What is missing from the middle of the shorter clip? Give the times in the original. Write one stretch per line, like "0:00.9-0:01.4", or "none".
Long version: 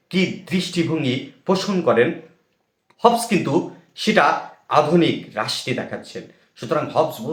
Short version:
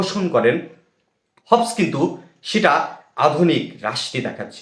none